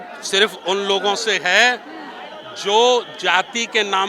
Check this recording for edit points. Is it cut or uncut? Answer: uncut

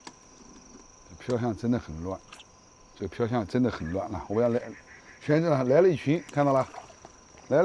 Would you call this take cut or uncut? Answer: uncut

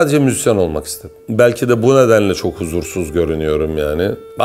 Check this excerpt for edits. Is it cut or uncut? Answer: cut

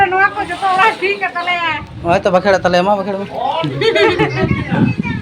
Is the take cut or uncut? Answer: uncut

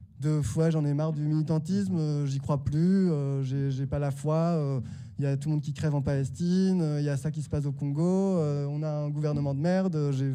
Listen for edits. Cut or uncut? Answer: uncut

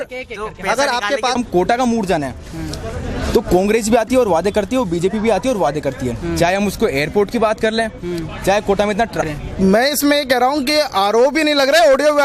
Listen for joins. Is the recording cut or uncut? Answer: cut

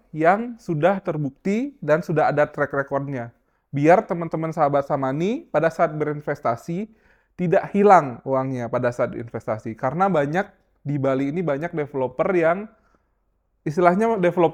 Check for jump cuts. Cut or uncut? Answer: uncut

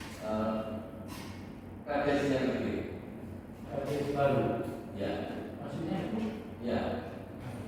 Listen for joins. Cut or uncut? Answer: uncut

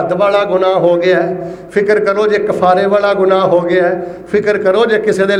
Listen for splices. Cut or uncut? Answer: uncut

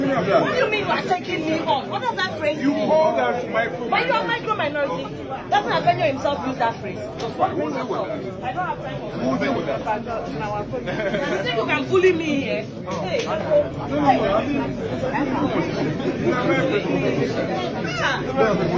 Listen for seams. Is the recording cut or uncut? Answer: uncut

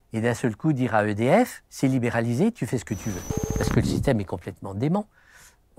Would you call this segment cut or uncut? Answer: cut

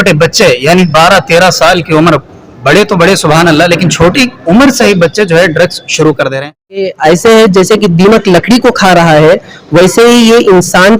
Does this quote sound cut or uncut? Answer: cut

